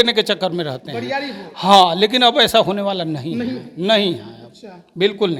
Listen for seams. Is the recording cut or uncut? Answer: uncut